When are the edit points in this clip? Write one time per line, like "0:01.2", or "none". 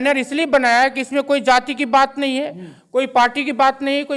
none